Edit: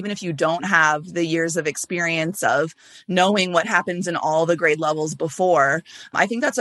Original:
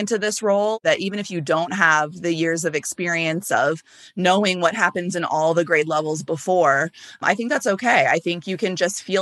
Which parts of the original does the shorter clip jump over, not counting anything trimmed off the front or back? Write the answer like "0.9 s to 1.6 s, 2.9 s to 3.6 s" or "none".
none